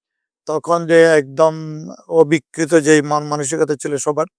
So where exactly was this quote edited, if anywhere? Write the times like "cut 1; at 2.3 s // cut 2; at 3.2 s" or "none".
none